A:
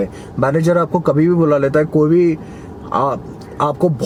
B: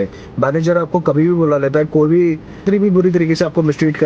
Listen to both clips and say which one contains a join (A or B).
B